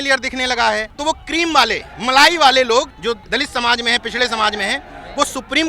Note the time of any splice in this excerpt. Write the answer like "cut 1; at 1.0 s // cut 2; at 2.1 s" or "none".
cut 1; at 0.9 s // cut 2; at 1.9 s // cut 3; at 3.1 s